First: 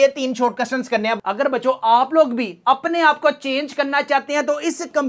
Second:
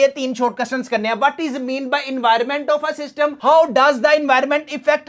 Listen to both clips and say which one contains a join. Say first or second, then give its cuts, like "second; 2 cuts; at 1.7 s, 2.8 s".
first; 1 cut; at 1.2 s